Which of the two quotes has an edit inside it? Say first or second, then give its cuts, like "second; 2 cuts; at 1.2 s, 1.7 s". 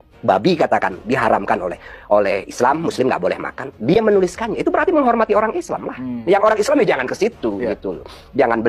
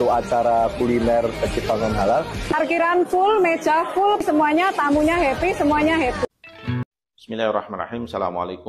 second; 1 cut; at 6.8 s